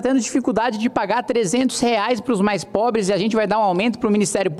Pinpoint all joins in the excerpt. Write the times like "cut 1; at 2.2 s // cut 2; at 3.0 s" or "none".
none